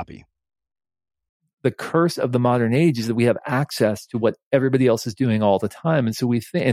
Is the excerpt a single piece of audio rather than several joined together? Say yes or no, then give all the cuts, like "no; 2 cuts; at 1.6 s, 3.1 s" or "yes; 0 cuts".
no; 1 cut; at 1.4 s